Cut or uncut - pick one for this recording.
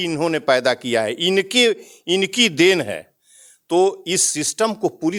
uncut